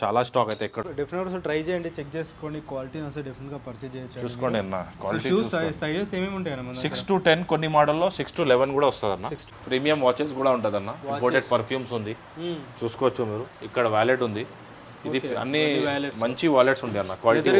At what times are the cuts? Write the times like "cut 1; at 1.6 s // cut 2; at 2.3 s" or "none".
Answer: cut 1; at 0.8 s // cut 2; at 9.5 s